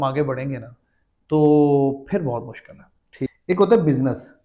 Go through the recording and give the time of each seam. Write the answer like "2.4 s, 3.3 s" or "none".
3.1 s